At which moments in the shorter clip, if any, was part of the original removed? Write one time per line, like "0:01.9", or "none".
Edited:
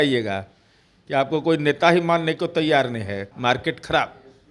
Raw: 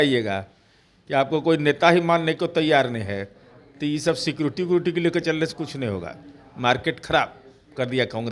0:03.3